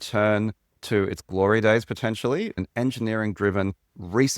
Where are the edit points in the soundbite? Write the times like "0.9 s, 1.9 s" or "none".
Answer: 2.6 s